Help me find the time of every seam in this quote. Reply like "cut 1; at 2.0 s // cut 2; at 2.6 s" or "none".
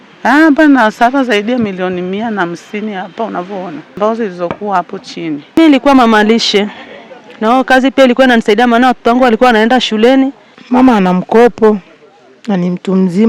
cut 1; at 4.0 s // cut 2; at 5.4 s // cut 3; at 10.6 s